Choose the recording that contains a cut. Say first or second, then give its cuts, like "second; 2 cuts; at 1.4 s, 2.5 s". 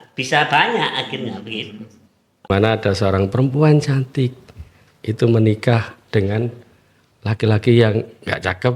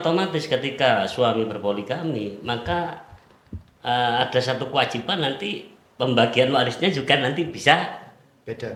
first; 1 cut; at 2.5 s